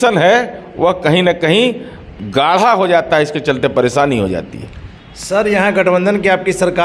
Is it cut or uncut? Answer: uncut